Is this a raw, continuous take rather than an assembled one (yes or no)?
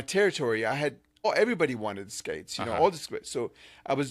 no